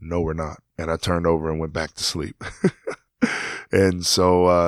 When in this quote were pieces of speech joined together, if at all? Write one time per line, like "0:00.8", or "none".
none